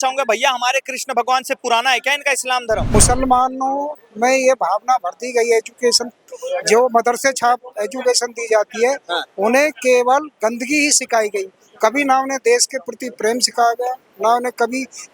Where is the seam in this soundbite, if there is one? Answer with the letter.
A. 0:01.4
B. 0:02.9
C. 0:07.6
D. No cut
B